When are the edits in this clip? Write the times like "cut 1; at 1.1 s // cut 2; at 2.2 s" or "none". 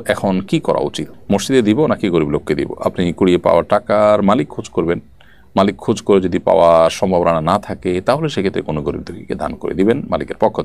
none